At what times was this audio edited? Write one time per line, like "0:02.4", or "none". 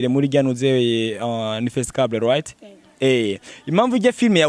none